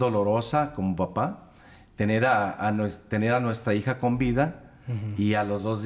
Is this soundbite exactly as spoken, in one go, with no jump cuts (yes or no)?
yes